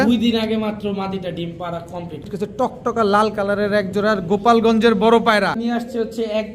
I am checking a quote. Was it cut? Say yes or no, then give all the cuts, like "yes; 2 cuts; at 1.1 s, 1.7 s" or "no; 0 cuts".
yes; 2 cuts; at 2.3 s, 5.6 s